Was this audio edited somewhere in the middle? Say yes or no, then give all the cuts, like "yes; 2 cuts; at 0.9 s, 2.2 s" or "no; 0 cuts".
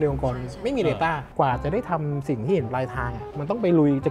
yes; 1 cut; at 1.2 s